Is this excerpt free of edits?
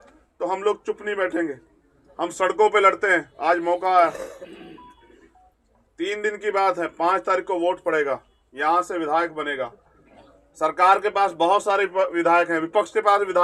yes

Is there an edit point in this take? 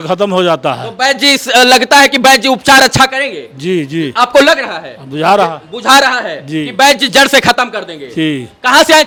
no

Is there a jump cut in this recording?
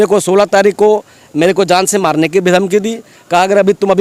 no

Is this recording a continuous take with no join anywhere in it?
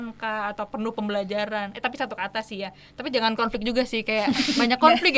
yes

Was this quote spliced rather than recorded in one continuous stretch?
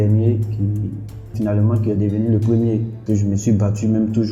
yes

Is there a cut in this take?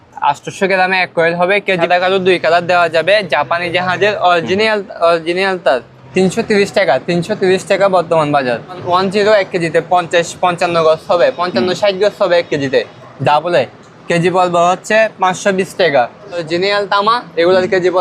yes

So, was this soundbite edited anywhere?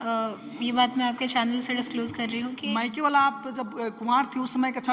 yes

